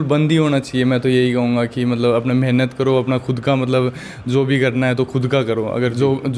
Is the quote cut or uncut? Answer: uncut